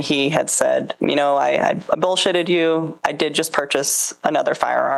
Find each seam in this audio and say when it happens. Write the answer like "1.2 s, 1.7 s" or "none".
0.9 s, 3.0 s

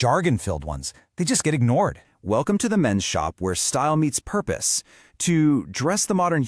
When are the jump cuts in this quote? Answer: 2.1 s

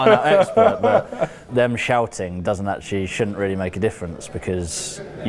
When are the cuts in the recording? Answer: 1.4 s

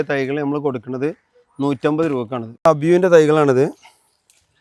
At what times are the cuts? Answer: 2.4 s

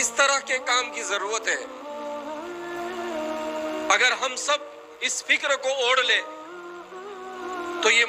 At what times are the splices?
1.7 s, 3.9 s

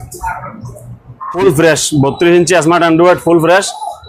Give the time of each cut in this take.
1.4 s

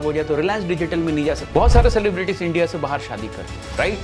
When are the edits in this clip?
1.4 s

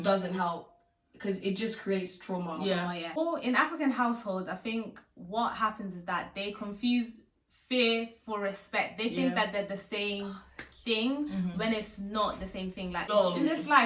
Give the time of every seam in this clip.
3.2 s, 13.1 s

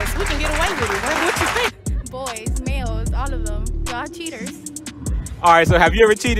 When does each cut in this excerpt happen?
1.7 s

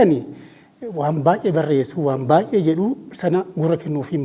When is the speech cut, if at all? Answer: none

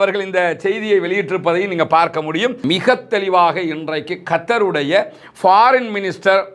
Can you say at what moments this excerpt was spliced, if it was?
2.6 s

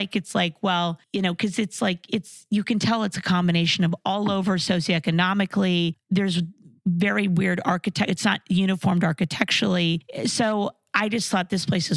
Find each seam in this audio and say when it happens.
1.0 s, 6.0 s, 10.1 s

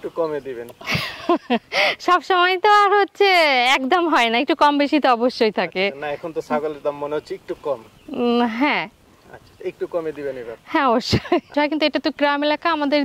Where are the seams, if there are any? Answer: 11.5 s

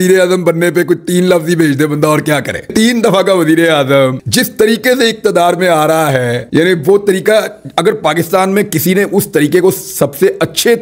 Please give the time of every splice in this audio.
none

